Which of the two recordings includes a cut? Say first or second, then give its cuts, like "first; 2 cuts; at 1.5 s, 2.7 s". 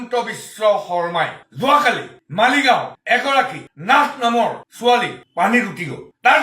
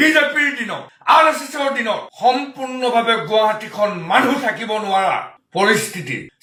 first; 1 cut; at 1.4 s